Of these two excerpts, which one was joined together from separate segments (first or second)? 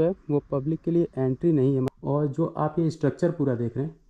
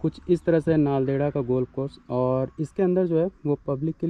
first